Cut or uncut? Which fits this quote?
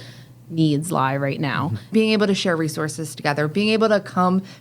cut